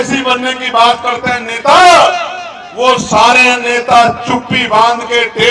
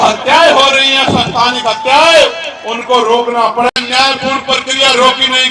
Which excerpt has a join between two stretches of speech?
second; 1 cut; at 3.7 s

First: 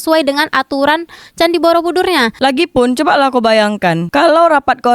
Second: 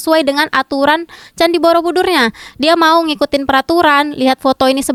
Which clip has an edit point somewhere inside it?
first; 2 cuts; at 2.4 s, 4.0 s

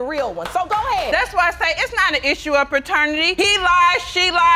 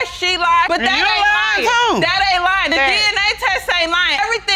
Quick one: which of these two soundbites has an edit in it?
first; 1 cut; at 1.1 s

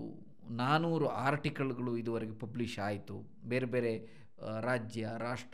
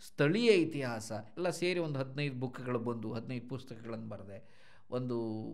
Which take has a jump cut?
second; 1 cut; at 1.3 s

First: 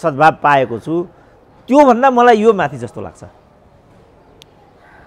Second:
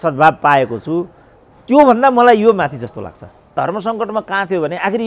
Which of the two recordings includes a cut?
second; 1 cut; at 3.5 s

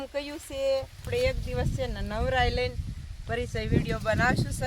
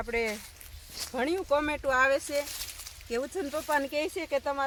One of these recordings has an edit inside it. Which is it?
first; 1 cut; at 1.1 s

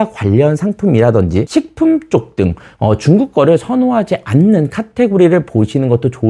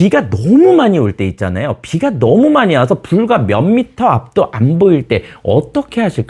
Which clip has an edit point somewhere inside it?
first; 1 cut; at 1.5 s

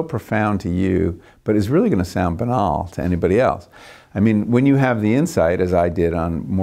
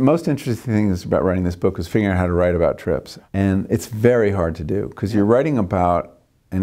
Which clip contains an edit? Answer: second; 1 cut; at 3.2 s

